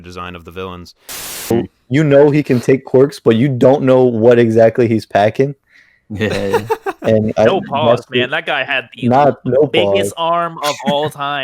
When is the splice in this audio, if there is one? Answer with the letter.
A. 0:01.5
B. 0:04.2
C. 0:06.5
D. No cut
A